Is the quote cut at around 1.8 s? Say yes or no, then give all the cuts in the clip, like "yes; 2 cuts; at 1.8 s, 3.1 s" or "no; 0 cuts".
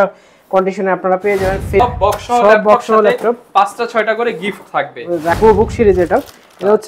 yes; 2 cuts; at 1.8 s, 5.3 s